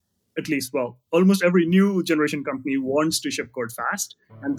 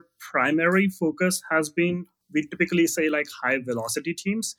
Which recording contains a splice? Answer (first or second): second